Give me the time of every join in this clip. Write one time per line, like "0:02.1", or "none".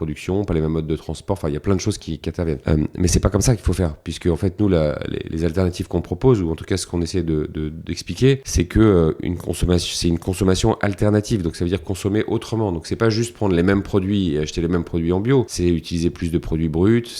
0:02.6
0:08.5
0:15.5